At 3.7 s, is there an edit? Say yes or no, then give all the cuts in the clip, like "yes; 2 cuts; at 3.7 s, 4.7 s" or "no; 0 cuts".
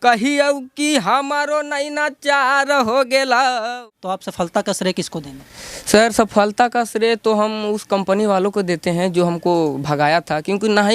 yes; 1 cut; at 3.7 s